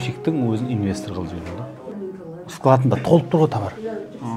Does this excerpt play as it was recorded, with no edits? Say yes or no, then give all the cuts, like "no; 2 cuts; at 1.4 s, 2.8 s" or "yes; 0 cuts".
no; 1 cut; at 1.8 s